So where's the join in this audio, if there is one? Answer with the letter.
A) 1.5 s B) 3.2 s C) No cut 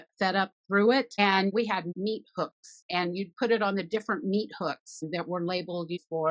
A